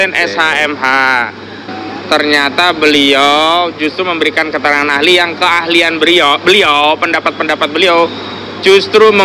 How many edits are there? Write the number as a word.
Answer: one